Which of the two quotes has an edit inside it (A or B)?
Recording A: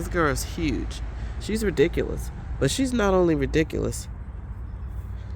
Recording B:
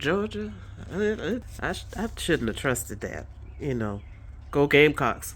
B